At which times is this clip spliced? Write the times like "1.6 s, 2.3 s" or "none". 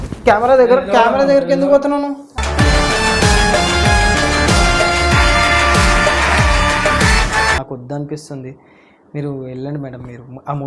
7.6 s